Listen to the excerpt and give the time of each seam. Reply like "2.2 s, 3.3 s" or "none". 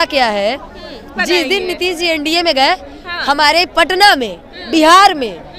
1.1 s